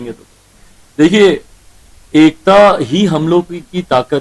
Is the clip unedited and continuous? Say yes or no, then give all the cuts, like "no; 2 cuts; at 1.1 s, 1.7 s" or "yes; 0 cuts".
yes; 0 cuts